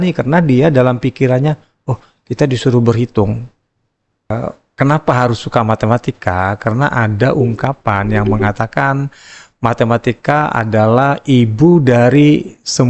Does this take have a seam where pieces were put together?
yes; 1 cut; at 4.3 s

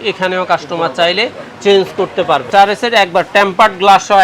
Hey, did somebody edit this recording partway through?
yes; 1 cut; at 2.5 s

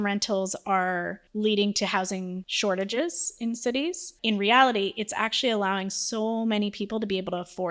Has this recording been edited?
yes; 3 cuts; at 1.2 s, 2.4 s, 4.1 s

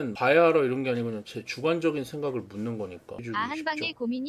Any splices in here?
yes; 1 cut; at 3.2 s

